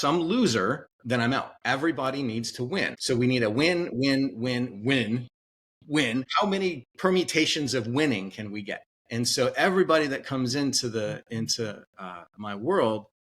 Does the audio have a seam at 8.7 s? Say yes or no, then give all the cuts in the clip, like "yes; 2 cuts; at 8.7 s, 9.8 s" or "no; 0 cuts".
no; 3 cuts; at 1.5 s, 3.0 s, 6.1 s